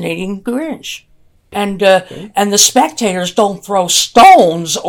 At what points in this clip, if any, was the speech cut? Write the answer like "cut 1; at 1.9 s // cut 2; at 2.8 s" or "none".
cut 1; at 1.5 s